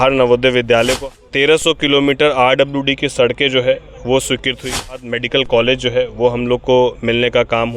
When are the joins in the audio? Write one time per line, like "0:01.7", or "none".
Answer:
0:00.9
0:05.2